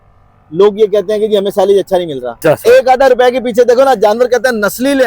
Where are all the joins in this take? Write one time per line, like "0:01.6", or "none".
0:02.4

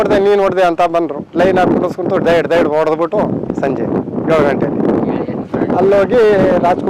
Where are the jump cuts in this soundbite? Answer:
0:03.5
0:05.4

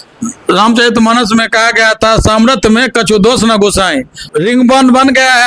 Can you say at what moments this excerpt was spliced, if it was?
0:04.3

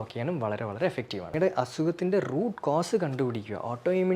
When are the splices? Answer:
0:01.3

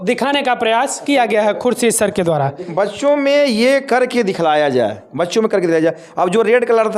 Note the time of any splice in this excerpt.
0:02.6

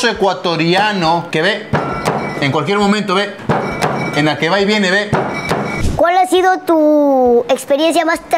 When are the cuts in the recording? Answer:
0:01.3
0:05.8

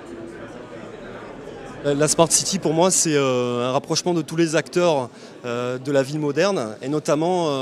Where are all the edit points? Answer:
0:02.7

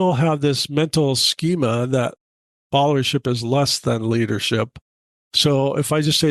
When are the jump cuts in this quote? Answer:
none

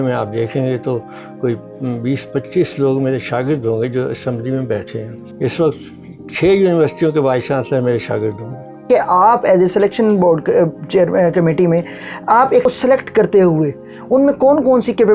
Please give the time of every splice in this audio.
0:08.9
0:12.6

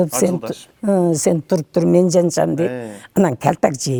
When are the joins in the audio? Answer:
none

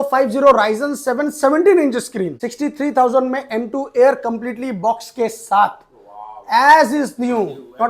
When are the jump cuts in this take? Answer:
0:02.4

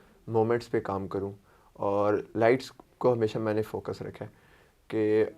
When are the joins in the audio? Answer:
none

